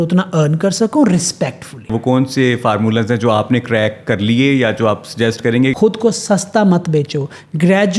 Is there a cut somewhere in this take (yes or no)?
yes